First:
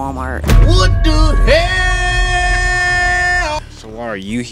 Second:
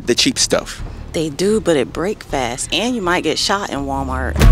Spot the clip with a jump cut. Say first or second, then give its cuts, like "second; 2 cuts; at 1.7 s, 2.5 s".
first; 1 cut; at 3.6 s